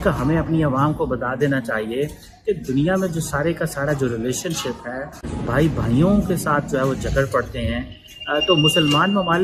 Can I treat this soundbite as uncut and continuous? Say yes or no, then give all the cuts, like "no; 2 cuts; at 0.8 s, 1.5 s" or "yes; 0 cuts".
yes; 0 cuts